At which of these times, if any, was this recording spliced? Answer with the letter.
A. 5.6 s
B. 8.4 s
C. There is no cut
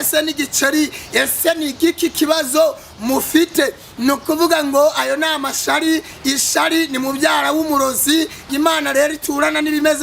B